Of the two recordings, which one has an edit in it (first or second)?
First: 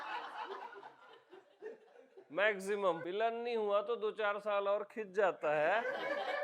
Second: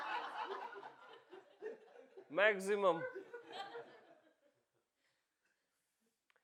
first